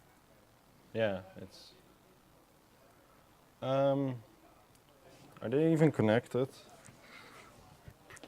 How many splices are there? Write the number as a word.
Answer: one